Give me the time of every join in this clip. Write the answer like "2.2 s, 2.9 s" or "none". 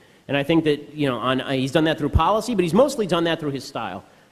1.7 s